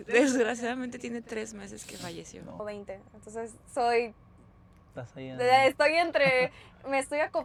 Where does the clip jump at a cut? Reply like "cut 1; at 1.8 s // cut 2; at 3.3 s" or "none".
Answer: none

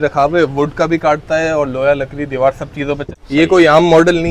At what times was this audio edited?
cut 1; at 3.0 s

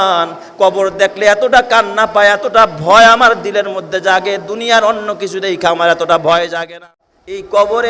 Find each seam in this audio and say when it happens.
cut 1; at 6.7 s

